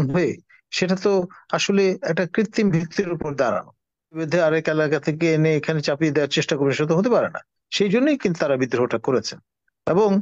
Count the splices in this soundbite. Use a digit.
1